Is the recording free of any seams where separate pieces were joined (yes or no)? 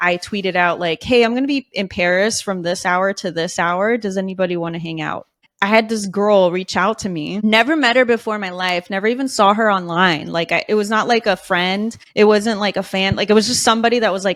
yes